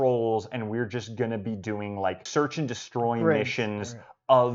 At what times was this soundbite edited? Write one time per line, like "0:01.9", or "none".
0:02.2